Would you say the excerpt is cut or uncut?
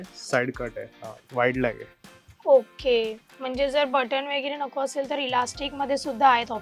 uncut